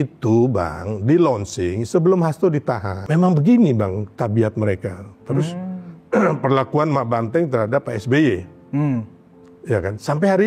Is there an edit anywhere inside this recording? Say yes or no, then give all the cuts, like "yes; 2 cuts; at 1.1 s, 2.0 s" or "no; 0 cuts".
yes; 1 cut; at 2.9 s